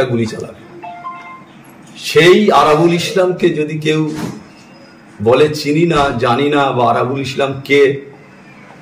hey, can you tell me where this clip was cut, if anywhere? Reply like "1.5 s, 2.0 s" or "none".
none